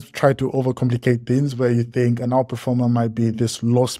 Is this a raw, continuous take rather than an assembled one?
yes; 0 cuts

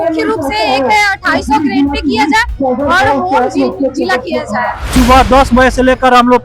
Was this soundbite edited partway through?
yes; 1 cut; at 4.8 s

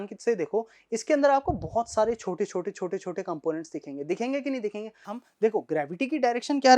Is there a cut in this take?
yes; 1 cut; at 5.1 s

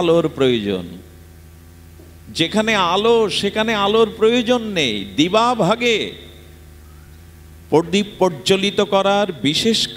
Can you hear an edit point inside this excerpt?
no; 0 cuts

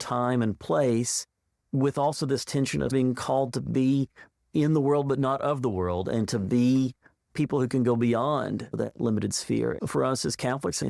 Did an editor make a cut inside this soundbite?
yes; 1 cut; at 9.8 s

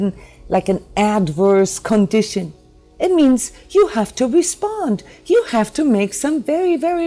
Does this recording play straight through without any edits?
yes; 0 cuts

